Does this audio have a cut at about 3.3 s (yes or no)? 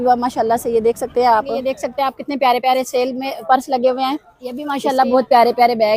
no